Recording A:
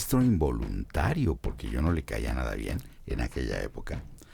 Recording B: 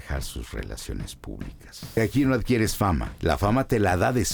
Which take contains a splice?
B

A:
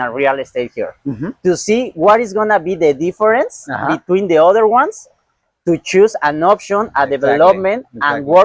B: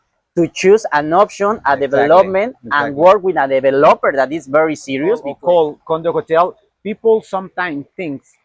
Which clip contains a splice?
B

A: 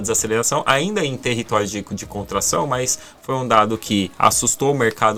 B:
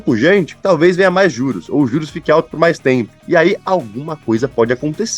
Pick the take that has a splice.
B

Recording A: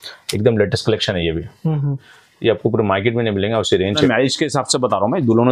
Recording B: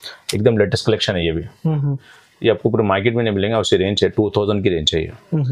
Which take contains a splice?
A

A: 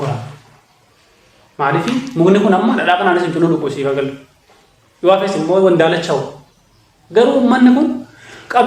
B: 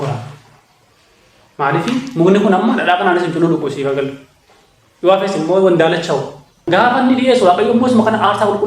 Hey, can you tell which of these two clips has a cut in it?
B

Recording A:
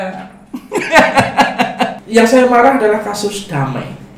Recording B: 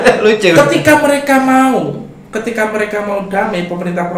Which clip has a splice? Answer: A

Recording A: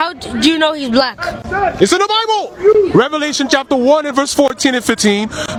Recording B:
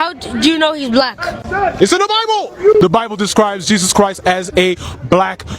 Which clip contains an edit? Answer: B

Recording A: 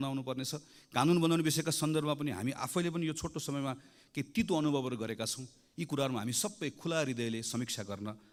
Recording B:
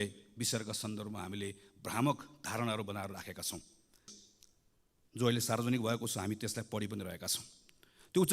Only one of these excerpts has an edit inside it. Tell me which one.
B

